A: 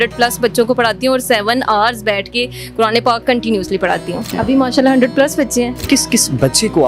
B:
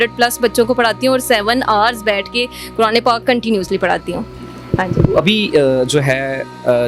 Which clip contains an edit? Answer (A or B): A